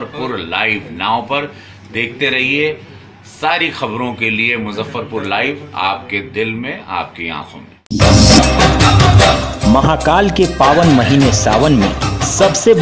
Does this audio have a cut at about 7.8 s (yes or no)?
yes